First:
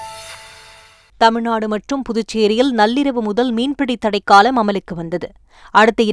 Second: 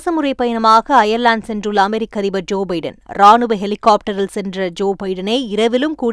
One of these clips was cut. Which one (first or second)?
first